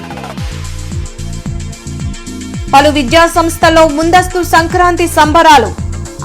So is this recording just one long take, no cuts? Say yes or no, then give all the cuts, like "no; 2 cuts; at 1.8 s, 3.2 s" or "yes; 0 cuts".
no; 1 cut; at 1.6 s